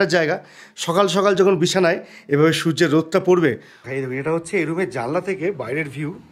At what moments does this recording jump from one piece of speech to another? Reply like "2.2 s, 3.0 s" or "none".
3.8 s

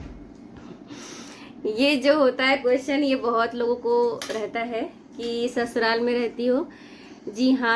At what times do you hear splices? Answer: none

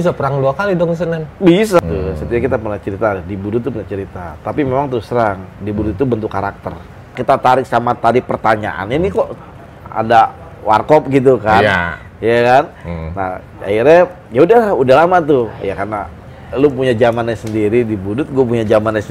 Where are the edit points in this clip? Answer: 1.8 s, 7.2 s

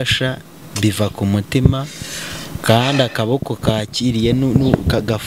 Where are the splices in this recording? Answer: none

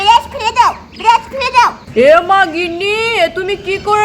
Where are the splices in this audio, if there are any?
1.8 s

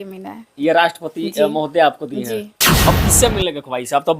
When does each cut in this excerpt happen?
2.8 s

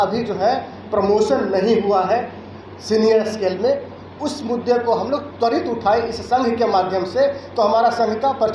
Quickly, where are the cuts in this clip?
none

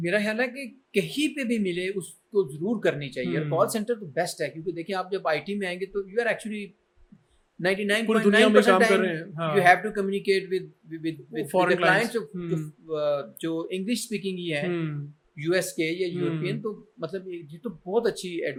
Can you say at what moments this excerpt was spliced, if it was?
none

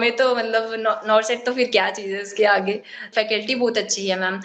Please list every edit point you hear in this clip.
3.1 s

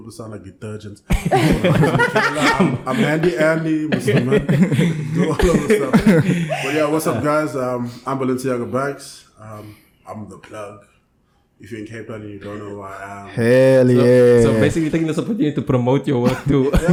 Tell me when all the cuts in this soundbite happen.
none

